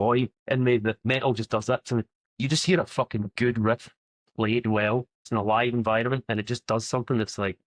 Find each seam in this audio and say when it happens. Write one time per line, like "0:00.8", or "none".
0:01.1
0:02.2
0:05.2